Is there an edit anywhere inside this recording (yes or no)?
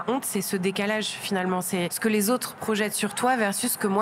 yes